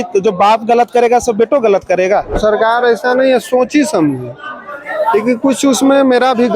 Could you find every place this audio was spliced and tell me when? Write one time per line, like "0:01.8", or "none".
0:02.4